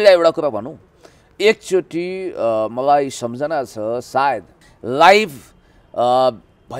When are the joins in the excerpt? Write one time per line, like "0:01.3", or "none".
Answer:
0:04.5